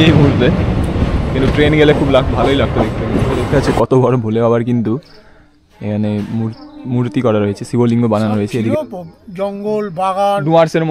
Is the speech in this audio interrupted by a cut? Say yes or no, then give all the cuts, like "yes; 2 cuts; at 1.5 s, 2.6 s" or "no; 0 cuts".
yes; 2 cuts; at 3.4 s, 8.7 s